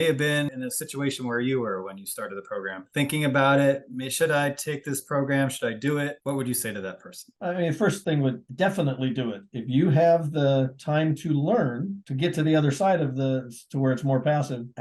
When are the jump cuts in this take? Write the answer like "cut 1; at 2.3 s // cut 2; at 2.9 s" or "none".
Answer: none